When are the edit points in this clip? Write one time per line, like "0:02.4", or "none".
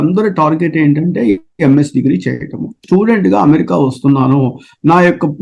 0:02.8

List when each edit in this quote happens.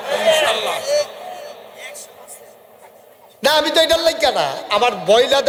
none

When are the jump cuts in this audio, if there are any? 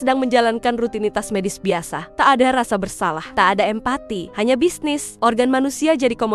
0:02.0
0:03.2
0:04.2
0:05.1

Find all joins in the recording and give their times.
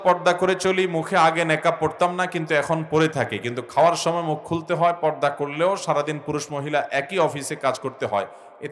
none

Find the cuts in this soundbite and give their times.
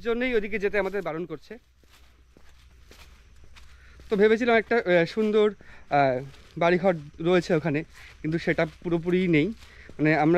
none

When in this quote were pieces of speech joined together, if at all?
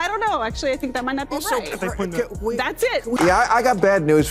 0:03.3

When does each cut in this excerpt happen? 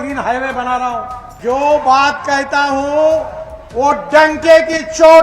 0:01.2

